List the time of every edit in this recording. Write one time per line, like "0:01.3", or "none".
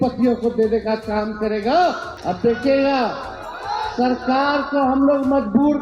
0:02.1